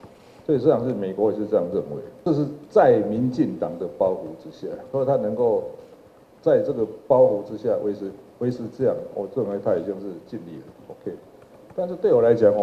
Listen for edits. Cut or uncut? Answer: cut